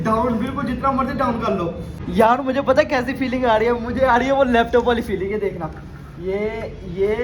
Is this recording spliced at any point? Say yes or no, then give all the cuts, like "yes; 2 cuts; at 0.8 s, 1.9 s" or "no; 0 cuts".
yes; 1 cut; at 1.9 s